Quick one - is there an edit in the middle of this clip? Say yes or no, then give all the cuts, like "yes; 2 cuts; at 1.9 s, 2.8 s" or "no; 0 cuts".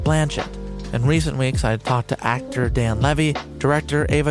no; 0 cuts